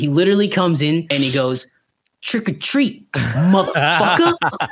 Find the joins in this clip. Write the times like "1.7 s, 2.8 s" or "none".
1.1 s